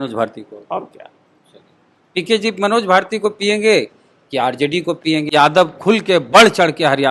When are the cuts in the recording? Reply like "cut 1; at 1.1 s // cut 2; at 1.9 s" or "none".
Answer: cut 1; at 5.3 s